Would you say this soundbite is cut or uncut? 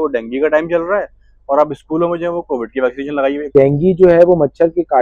cut